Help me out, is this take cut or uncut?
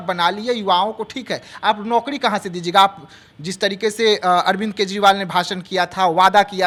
uncut